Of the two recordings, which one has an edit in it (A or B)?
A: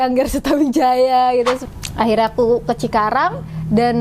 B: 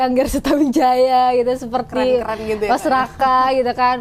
A